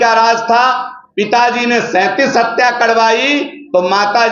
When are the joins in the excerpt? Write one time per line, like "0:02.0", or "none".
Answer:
none